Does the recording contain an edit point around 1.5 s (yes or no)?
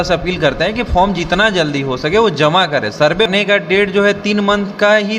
no